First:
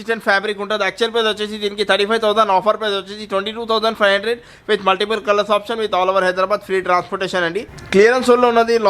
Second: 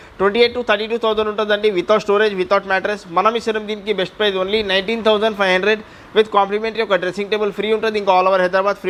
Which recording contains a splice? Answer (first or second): first